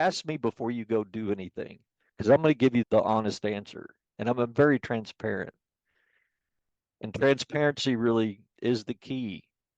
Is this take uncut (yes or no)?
no